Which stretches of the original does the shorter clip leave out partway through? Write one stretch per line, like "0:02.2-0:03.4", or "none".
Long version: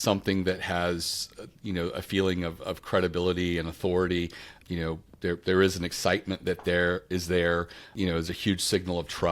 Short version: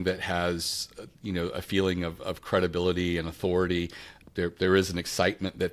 0:04.6-0:05.0